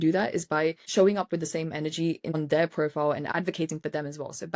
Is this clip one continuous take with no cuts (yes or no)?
no